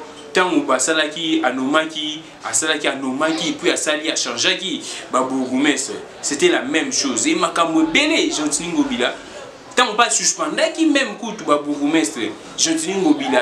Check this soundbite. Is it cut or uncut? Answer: uncut